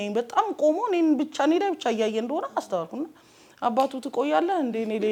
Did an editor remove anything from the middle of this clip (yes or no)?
no